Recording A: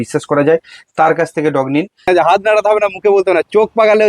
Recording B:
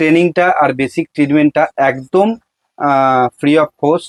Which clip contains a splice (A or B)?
A